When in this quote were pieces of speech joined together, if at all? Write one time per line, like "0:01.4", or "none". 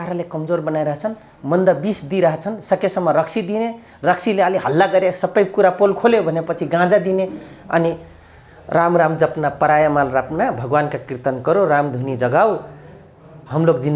none